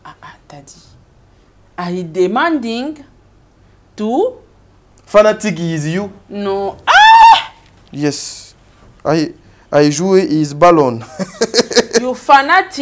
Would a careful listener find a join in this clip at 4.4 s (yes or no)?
no